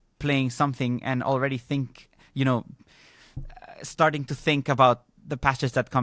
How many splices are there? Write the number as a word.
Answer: zero